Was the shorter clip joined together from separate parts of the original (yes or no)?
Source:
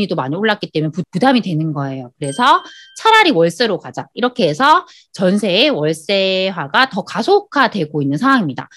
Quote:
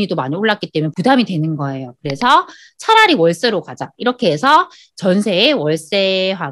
yes